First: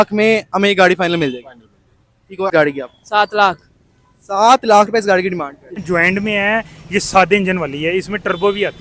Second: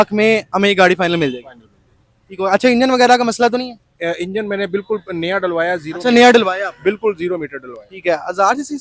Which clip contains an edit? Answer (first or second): first